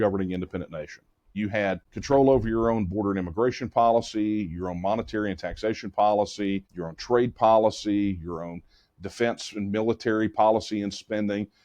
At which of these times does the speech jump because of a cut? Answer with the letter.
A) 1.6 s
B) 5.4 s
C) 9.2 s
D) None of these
A